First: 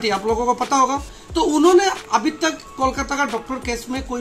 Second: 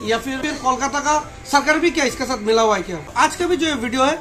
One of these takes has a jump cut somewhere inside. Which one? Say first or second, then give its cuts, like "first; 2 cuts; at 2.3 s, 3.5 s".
second; 1 cut; at 3.1 s